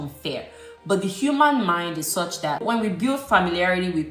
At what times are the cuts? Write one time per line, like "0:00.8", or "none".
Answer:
0:02.6